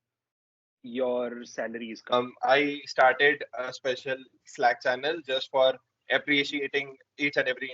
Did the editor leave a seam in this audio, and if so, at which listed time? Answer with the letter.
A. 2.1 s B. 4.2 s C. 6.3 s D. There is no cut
A